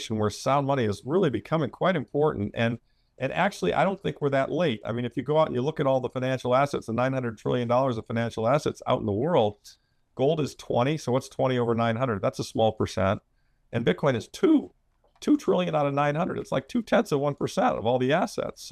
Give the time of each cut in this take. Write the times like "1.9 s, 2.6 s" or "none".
none